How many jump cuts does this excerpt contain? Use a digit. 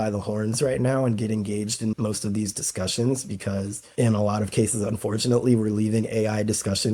1